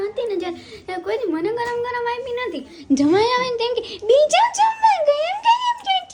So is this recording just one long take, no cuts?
yes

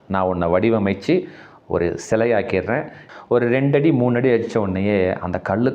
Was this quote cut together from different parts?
yes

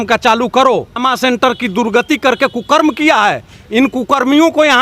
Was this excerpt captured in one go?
no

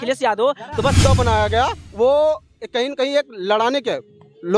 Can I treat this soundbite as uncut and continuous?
no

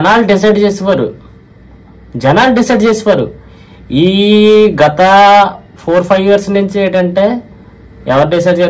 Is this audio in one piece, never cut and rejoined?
yes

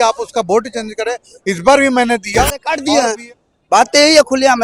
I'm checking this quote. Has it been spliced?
yes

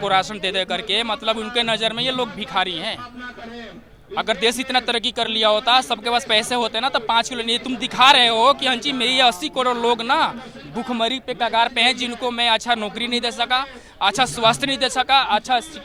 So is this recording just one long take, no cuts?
yes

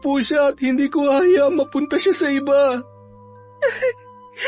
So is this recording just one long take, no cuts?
no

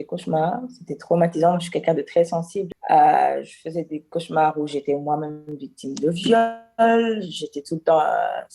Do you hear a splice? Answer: yes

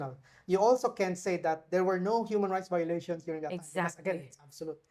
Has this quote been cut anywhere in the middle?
no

